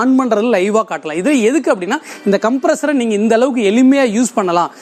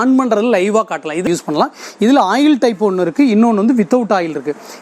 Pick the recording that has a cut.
second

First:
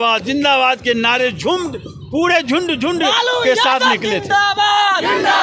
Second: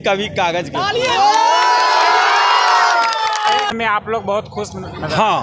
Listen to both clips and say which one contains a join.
second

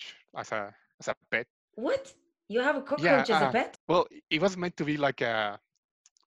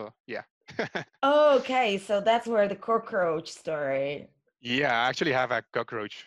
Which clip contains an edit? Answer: first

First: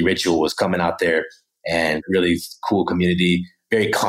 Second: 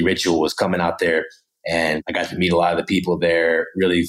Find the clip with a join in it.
first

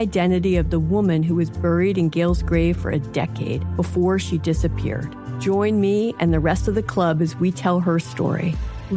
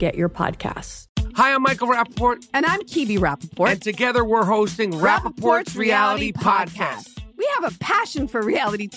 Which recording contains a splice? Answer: second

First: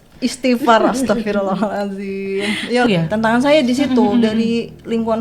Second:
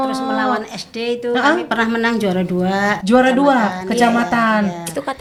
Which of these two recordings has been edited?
first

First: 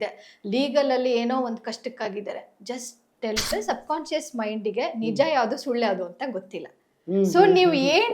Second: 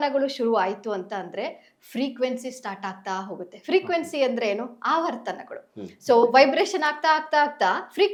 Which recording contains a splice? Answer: first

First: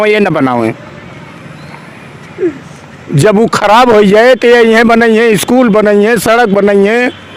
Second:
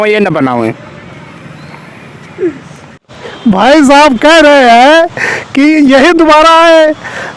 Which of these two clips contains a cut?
second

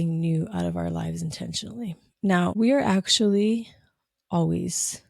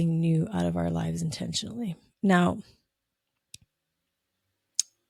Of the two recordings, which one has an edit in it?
first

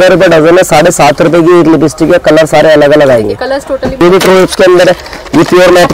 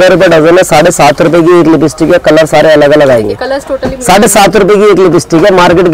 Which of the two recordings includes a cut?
first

